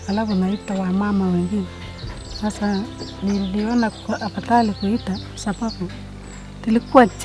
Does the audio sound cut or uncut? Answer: uncut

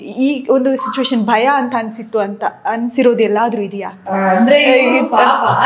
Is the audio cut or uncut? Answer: cut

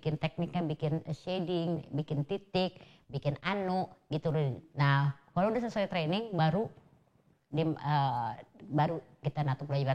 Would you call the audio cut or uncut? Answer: uncut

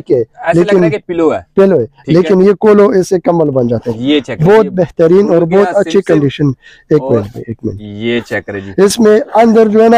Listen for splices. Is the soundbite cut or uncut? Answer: uncut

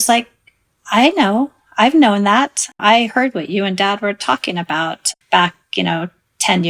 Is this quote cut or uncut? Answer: cut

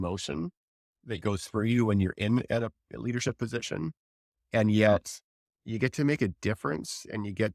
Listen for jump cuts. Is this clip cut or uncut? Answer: cut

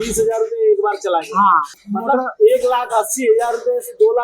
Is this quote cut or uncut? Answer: cut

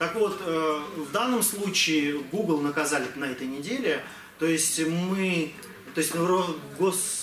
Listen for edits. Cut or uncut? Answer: uncut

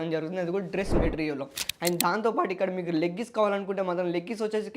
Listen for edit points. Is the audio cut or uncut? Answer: cut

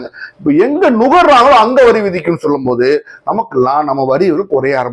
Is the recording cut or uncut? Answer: uncut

